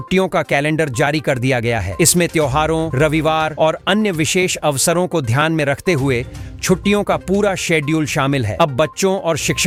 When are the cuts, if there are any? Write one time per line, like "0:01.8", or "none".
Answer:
none